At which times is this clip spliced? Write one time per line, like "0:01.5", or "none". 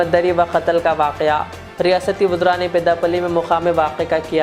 none

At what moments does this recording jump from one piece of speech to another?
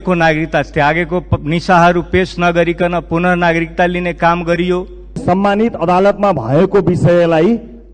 0:05.2

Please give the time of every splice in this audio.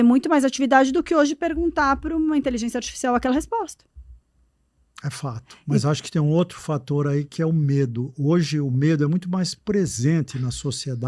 none

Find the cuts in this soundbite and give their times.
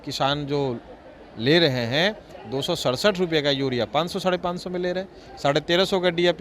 none

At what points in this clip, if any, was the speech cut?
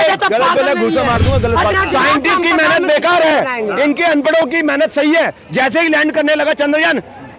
0:01.7

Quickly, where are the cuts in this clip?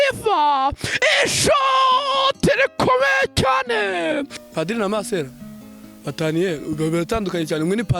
0:04.4

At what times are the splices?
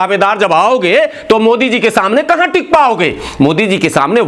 none

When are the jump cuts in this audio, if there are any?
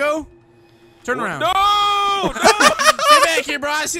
none

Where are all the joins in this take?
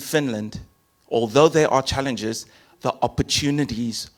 none

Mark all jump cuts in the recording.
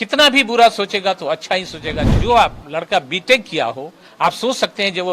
0:02.1

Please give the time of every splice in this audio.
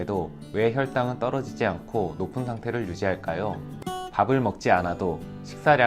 none

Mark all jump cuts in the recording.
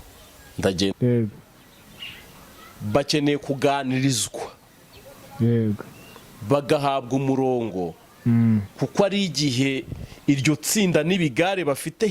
0:00.9

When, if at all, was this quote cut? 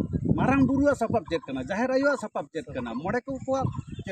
none

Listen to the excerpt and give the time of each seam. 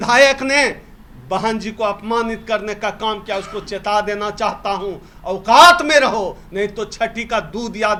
none

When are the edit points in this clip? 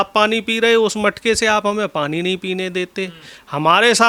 none

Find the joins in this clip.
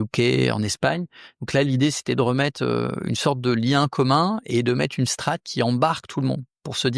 none

